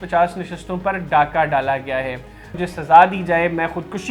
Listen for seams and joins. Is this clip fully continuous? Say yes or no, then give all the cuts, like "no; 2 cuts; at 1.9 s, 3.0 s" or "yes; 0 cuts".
no; 1 cut; at 2.6 s